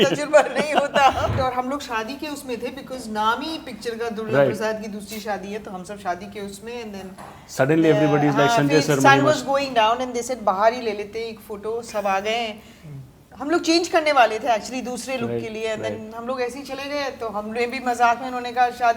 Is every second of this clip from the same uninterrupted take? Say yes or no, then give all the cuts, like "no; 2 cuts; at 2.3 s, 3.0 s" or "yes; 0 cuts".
no; 1 cut; at 1.3 s